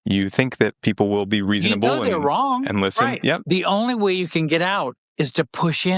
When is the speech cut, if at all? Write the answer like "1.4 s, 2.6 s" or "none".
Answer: 3.4 s

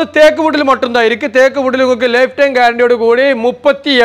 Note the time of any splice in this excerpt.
none

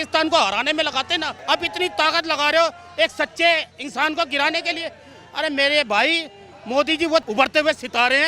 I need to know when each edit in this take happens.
1.3 s, 7.3 s

